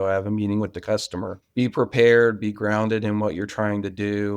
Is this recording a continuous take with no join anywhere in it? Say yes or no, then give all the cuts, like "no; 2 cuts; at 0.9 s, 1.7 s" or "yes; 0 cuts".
no; 1 cut; at 1.4 s